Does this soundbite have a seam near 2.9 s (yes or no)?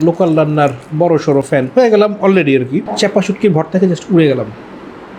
yes